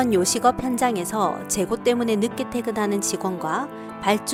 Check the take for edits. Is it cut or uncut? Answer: uncut